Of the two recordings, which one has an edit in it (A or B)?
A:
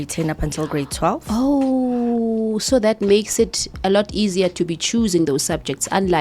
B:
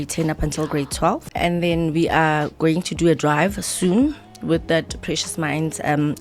B